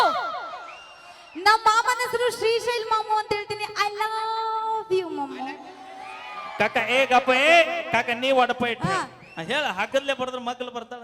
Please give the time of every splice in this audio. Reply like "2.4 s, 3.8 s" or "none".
8.8 s